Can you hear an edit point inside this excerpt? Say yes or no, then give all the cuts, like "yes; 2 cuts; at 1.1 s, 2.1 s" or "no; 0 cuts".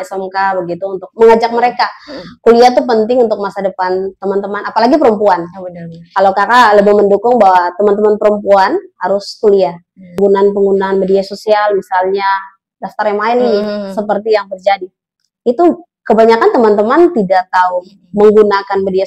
yes; 1 cut; at 10.2 s